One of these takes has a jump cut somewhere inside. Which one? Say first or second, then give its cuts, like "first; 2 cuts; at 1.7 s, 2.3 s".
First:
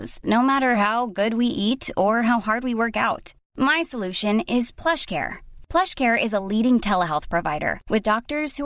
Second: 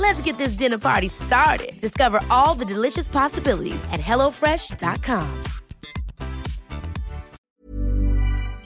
second; 1 cut; at 7.4 s